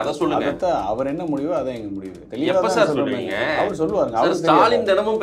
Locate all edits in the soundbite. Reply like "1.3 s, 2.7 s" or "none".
2.2 s